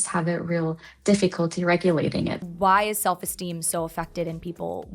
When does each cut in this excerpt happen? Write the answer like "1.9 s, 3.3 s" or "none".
2.4 s